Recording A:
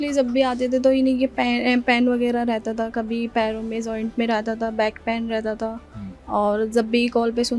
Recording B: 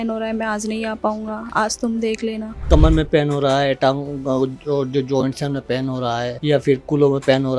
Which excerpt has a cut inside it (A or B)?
B